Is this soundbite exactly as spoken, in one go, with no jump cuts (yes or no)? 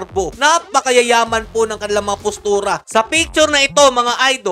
no